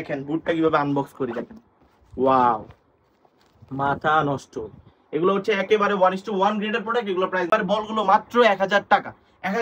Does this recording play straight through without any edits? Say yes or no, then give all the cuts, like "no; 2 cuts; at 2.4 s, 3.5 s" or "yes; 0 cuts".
no; 1 cut; at 7.5 s